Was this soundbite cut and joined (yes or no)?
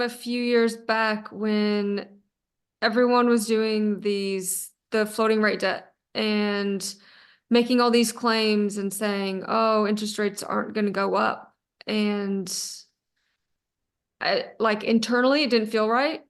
no